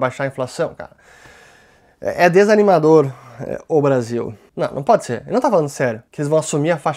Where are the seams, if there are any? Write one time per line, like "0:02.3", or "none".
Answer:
0:04.4
0:06.1